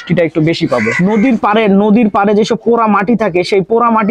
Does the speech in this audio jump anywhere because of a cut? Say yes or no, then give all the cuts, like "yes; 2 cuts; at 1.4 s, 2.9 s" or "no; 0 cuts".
yes; 1 cut; at 0.9 s